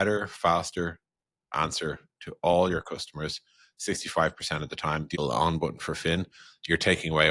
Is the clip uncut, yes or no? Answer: no